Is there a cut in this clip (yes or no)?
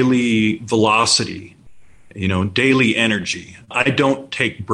yes